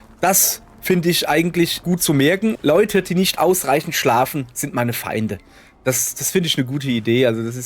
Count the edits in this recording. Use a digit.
1